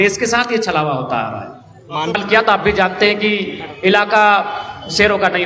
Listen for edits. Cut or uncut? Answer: cut